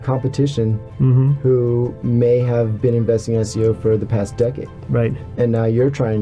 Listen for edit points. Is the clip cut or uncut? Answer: uncut